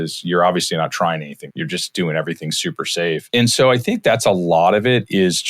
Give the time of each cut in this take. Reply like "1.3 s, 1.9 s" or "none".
1.4 s, 3.2 s